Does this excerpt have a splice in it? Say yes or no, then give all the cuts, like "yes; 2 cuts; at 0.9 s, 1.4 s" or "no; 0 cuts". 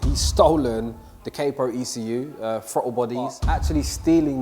yes; 1 cut; at 3.4 s